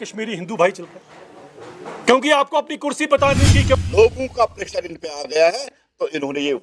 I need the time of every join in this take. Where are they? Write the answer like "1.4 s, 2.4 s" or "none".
3.8 s